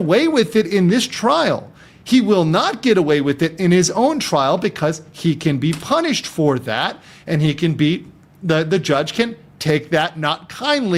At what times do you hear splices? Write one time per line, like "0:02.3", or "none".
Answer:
none